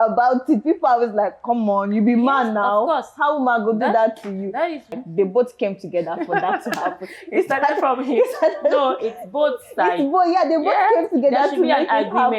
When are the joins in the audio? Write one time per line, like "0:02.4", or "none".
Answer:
0:05.0